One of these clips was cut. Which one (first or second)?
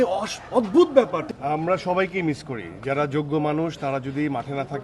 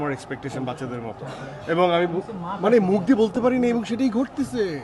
first